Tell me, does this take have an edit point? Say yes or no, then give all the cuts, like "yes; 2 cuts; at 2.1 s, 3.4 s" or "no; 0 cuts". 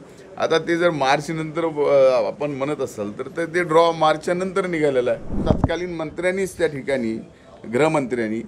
yes; 1 cut; at 5.4 s